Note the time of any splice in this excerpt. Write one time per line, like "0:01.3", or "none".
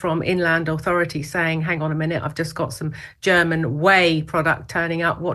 none